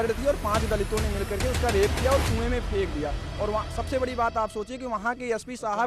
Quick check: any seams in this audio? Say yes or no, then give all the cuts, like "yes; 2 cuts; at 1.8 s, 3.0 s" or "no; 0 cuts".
no; 0 cuts